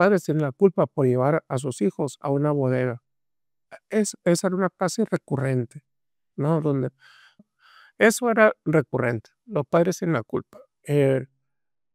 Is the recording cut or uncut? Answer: cut